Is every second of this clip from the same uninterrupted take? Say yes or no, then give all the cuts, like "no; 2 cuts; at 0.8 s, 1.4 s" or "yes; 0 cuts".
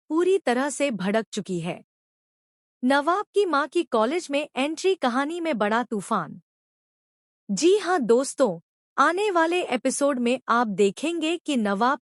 yes; 0 cuts